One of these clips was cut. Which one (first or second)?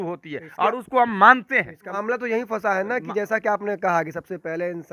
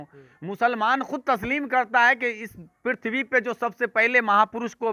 first